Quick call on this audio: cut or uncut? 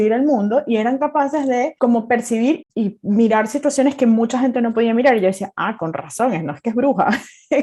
cut